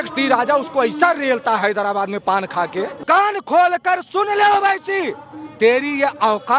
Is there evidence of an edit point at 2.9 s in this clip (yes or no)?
yes